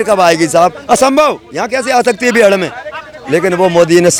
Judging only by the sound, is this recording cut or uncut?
uncut